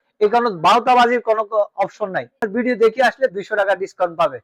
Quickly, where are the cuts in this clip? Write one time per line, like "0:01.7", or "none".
0:02.4